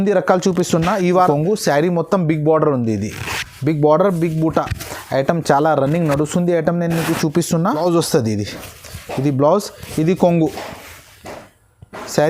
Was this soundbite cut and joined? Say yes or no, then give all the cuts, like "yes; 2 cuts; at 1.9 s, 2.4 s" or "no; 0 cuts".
yes; 2 cuts; at 1.3 s, 7.8 s